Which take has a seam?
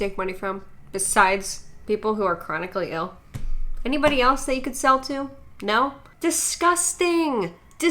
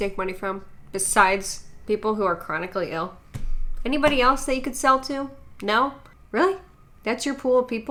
first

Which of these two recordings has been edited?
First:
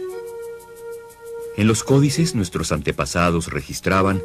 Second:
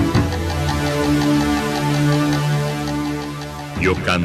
first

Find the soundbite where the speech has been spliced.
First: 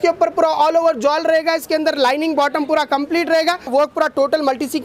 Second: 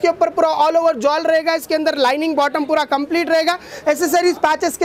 first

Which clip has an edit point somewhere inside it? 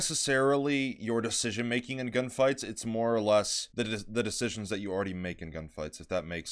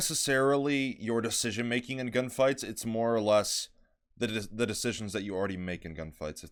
first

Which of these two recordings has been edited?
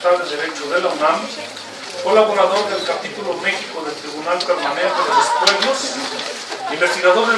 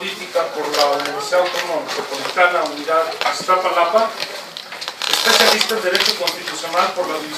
second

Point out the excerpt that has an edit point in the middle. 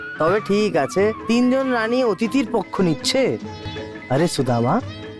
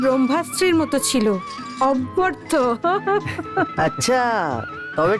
first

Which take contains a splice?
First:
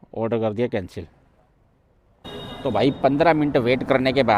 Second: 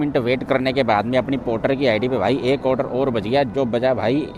first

